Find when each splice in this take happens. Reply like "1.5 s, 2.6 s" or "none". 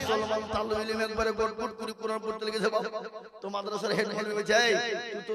none